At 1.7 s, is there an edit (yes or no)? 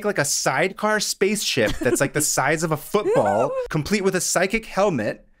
no